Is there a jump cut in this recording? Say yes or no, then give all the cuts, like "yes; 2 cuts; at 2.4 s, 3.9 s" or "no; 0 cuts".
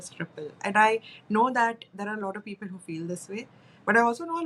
no; 0 cuts